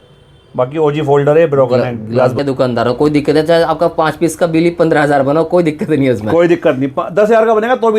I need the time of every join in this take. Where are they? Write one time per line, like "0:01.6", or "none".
0:02.4